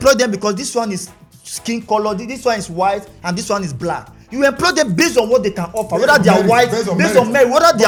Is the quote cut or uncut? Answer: uncut